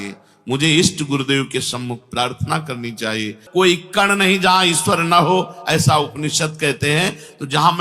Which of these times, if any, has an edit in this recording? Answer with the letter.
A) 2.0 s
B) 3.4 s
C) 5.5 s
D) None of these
B